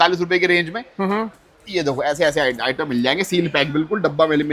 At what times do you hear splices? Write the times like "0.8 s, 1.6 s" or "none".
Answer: none